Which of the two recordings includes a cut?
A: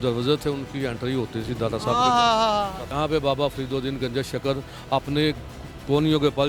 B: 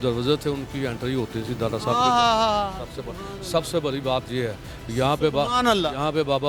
A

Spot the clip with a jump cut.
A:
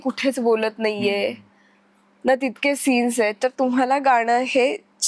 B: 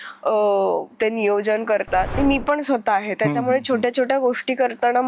B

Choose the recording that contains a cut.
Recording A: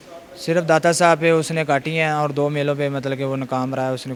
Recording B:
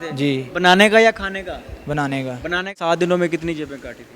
B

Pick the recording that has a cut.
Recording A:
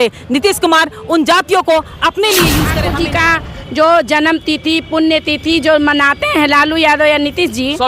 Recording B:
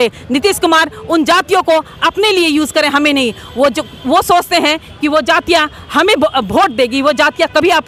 A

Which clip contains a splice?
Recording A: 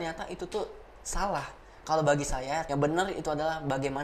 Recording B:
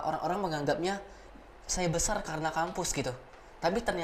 A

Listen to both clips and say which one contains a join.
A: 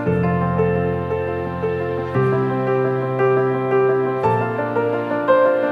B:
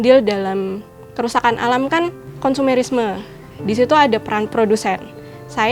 B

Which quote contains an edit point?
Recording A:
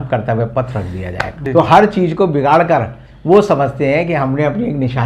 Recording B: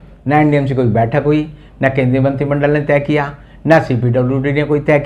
A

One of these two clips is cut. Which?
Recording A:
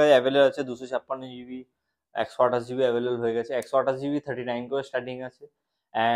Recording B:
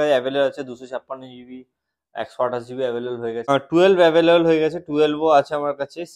B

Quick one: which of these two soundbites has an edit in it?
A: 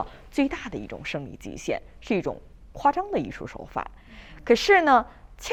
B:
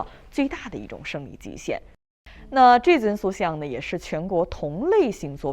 B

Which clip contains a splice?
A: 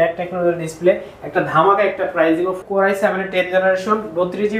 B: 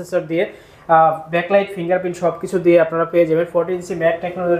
A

